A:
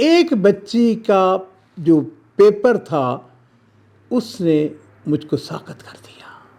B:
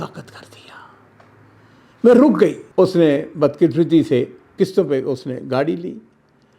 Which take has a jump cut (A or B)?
B